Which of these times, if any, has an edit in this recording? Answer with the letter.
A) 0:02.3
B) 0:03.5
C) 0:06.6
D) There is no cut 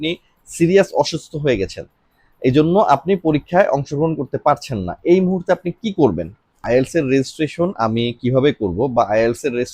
C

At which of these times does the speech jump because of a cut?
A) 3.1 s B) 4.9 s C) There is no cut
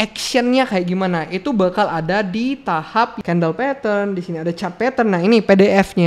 A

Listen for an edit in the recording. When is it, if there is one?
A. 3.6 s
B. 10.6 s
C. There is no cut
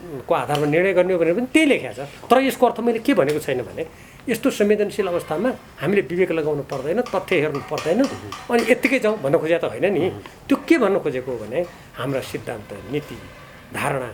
C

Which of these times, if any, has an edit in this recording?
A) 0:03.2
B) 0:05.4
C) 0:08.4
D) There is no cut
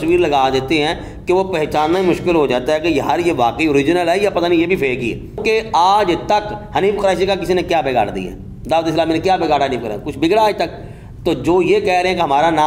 B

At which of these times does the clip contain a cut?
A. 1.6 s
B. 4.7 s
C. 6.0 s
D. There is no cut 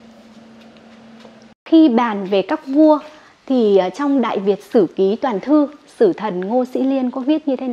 A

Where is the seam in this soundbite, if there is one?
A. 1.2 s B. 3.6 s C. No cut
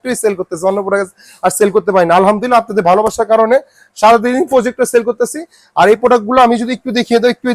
C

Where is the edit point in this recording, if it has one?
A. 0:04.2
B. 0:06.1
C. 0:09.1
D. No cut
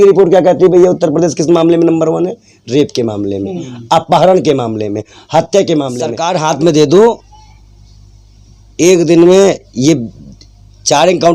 B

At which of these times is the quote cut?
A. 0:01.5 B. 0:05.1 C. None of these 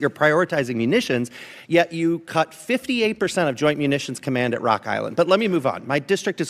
C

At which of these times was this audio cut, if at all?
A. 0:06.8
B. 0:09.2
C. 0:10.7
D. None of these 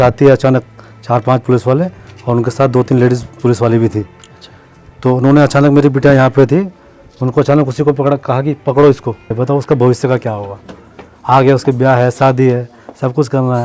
B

